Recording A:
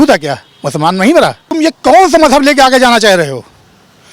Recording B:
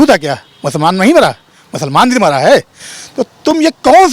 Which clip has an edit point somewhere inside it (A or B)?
A